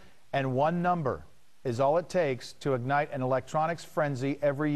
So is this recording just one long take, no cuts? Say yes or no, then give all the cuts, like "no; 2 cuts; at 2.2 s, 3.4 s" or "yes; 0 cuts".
yes; 0 cuts